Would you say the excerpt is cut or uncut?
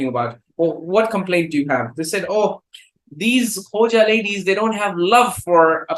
uncut